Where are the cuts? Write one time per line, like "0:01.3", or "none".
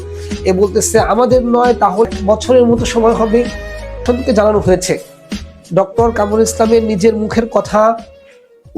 0:02.1
0:04.0